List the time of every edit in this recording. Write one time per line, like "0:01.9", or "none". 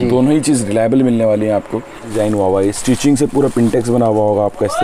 0:02.1